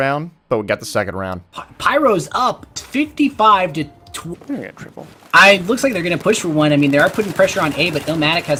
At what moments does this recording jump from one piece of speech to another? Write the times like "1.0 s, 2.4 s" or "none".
none